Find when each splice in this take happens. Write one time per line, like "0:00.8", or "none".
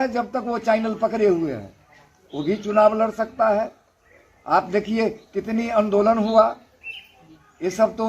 none